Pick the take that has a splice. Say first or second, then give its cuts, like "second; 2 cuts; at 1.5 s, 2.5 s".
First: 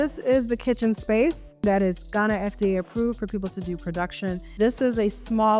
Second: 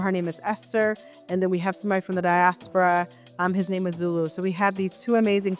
first; 2 cuts; at 1.6 s, 4.5 s